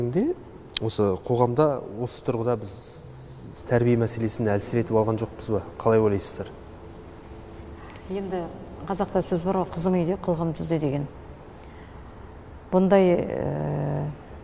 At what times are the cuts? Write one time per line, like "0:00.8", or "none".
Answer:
none